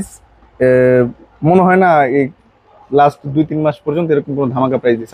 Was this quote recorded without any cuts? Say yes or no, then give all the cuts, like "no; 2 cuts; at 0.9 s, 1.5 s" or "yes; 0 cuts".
yes; 0 cuts